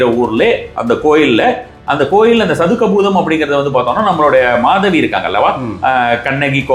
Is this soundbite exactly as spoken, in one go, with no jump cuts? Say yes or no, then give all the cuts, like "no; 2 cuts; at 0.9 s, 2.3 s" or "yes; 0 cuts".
yes; 0 cuts